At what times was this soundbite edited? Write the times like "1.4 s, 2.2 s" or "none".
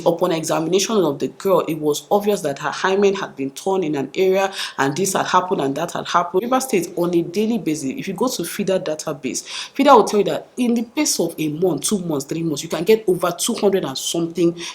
6.4 s

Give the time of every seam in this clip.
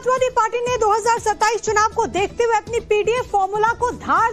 none

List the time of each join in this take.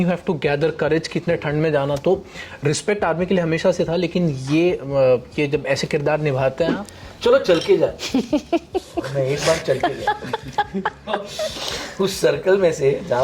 6.9 s

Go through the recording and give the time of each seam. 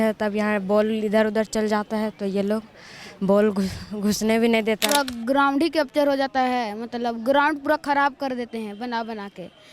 4.8 s

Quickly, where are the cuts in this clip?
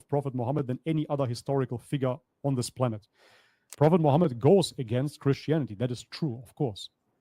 3.7 s

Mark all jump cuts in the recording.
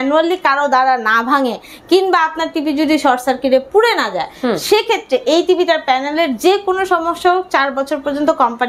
none

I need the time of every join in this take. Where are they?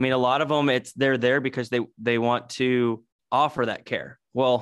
3.1 s

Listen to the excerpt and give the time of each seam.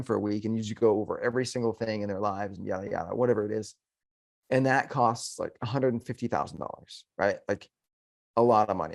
none

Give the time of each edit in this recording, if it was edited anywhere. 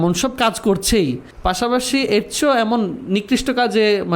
1.3 s

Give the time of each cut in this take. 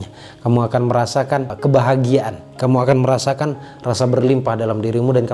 1.5 s

